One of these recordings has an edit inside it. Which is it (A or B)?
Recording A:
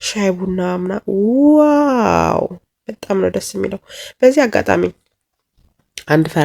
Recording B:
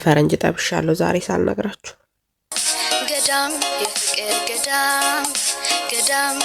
B